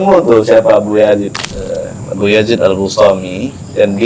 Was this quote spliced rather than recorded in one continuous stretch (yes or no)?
yes